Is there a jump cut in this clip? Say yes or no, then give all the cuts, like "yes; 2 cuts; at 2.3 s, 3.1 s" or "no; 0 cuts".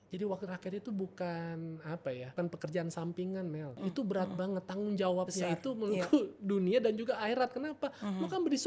yes; 2 cuts; at 2.3 s, 3.7 s